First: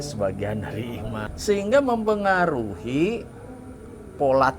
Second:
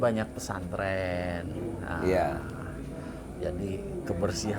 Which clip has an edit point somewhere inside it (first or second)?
first